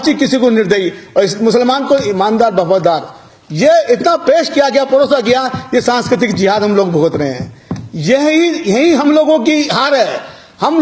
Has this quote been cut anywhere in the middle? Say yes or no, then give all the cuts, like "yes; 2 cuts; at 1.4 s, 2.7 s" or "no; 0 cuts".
no; 0 cuts